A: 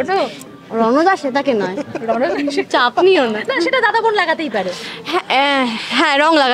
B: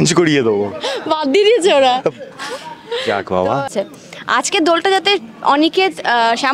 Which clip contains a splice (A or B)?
B